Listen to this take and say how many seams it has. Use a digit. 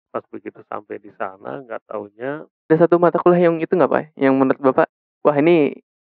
1